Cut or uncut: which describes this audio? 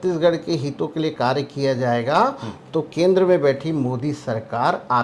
uncut